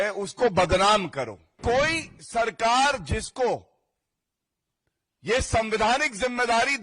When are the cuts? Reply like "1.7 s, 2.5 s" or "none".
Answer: 1.5 s